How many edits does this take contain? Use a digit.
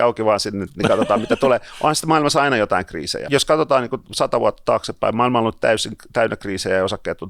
1